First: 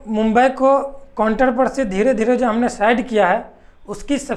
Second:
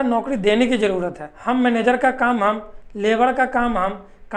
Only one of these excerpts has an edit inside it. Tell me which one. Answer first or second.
second